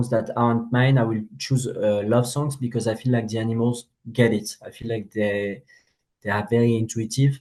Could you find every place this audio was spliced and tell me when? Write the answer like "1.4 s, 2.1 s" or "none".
none